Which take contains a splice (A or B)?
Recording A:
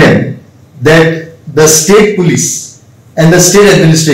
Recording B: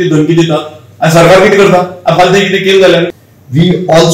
B